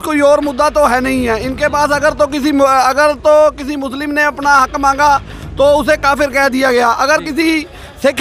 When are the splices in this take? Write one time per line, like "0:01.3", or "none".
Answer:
none